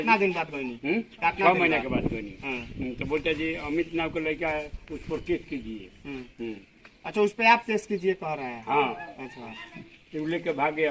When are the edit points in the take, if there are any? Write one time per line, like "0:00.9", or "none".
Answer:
none